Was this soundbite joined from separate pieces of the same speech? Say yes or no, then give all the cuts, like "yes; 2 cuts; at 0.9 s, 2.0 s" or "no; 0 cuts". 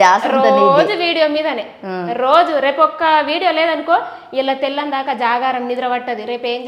no; 0 cuts